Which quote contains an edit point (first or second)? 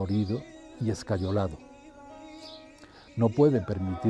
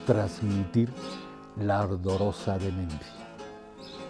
first